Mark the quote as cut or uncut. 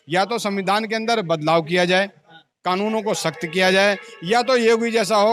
uncut